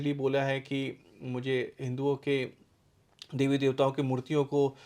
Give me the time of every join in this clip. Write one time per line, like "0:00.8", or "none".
none